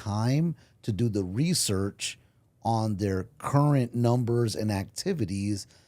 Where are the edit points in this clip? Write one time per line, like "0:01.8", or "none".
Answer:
none